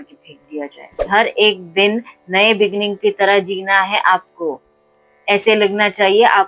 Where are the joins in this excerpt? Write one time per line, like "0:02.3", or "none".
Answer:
0:01.1